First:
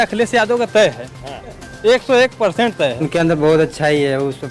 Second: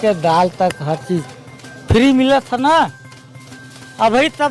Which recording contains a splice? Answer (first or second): first